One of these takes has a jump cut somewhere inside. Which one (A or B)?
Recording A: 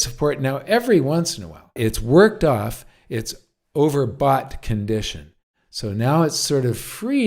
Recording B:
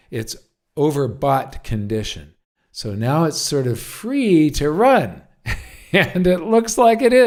A